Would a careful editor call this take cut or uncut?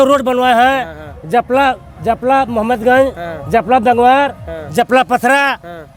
uncut